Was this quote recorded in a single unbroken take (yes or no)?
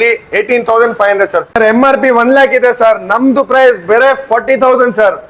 no